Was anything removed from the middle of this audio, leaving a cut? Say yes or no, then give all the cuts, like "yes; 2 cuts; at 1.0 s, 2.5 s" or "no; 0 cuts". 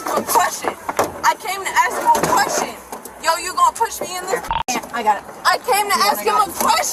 no; 0 cuts